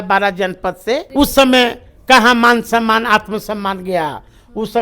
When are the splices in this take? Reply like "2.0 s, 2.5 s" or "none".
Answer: 1.1 s